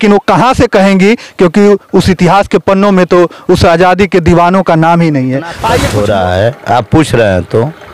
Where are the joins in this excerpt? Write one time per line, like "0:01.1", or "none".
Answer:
0:05.7